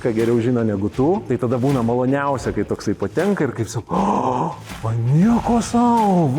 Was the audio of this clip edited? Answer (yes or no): yes